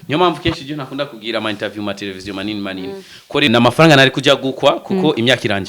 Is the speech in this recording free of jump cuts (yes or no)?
no